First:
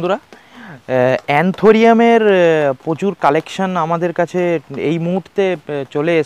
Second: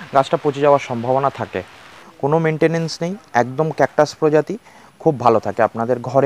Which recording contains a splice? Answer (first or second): second